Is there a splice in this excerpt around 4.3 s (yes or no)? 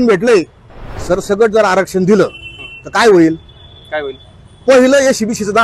no